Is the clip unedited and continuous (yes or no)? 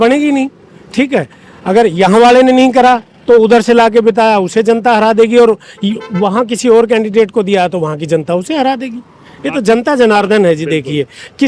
yes